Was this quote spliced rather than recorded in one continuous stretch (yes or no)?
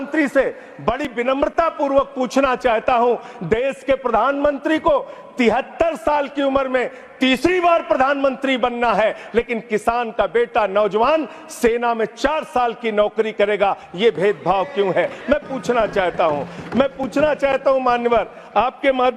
no